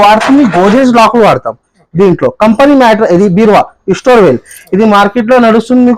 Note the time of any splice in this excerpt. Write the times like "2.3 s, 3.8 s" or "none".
none